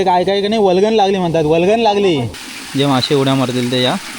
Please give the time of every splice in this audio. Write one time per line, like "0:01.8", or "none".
0:02.4